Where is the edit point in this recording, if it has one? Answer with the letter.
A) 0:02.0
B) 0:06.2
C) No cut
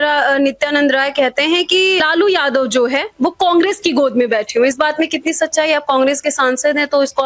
A